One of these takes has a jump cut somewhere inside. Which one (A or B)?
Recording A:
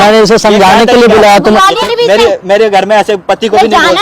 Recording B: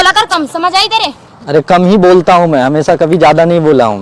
A